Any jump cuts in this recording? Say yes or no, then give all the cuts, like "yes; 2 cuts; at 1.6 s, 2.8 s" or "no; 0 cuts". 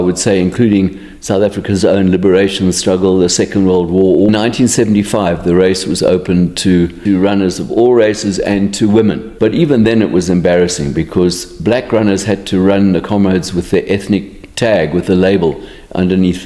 yes; 3 cuts; at 4.3 s, 7.0 s, 9.3 s